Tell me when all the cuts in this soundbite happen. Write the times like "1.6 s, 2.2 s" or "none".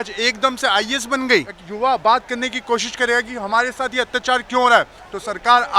1.6 s